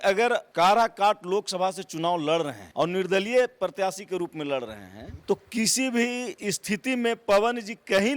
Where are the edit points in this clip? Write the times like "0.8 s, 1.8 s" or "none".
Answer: none